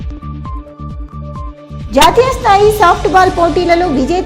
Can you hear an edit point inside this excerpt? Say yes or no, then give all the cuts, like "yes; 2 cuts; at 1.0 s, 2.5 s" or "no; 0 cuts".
yes; 1 cut; at 1.0 s